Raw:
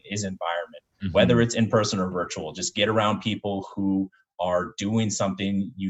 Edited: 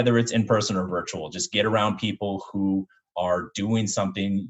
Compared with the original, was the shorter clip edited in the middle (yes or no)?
no